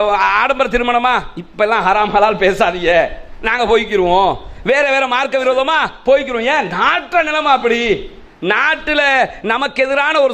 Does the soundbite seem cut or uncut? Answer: uncut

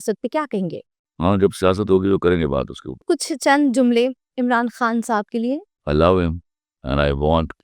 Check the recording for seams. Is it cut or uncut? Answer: cut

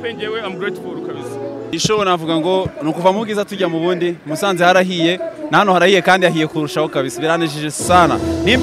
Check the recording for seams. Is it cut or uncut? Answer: cut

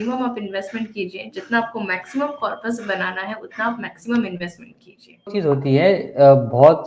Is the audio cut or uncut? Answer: cut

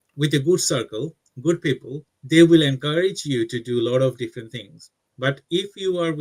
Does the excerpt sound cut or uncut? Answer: uncut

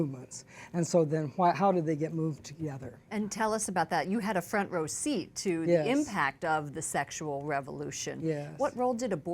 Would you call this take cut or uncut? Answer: cut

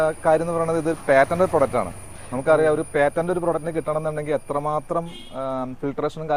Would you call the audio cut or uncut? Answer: uncut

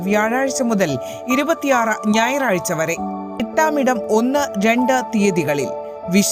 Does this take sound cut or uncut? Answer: cut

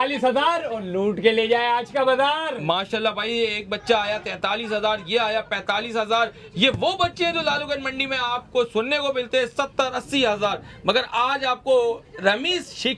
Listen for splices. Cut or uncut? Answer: uncut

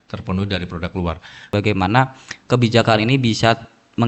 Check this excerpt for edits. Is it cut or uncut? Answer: cut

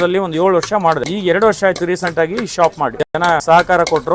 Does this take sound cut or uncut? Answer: cut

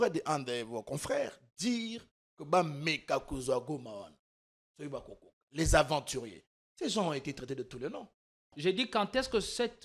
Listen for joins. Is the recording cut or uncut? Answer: cut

